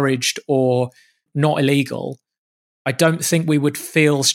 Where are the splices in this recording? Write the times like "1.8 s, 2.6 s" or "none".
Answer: 1.2 s